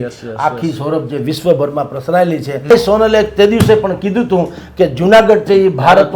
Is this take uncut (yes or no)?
no